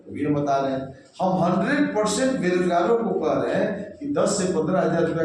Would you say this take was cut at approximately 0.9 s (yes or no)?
no